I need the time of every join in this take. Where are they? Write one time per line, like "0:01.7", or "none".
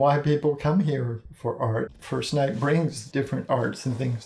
0:02.0
0:03.0